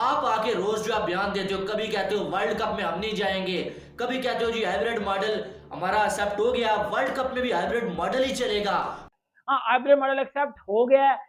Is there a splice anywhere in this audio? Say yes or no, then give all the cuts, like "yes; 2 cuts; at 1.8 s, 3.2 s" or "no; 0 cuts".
no; 0 cuts